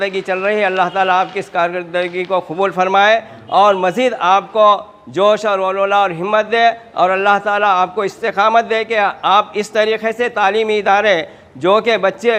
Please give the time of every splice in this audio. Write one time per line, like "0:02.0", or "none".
none